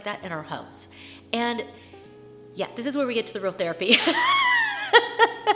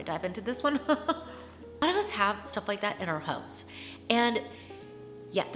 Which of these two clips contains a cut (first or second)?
second